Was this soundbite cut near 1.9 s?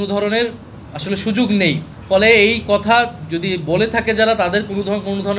yes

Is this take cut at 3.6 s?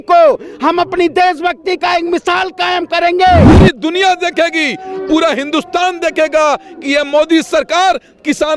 yes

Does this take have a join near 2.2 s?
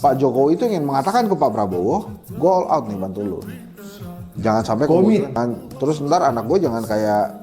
yes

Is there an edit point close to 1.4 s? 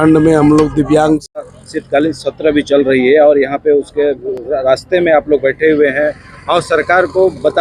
yes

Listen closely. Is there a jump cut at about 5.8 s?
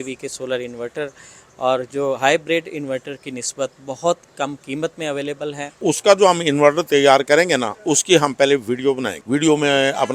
yes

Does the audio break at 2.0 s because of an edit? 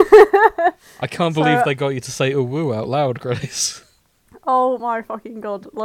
no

